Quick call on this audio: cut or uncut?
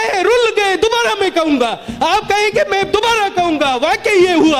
uncut